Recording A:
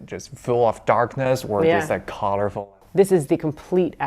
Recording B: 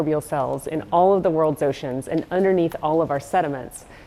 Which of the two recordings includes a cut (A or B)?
A